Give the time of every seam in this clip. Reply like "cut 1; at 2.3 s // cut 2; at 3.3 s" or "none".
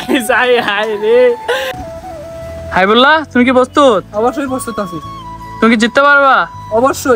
cut 1; at 2.0 s